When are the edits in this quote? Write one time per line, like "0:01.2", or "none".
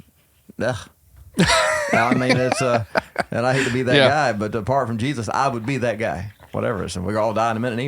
0:06.4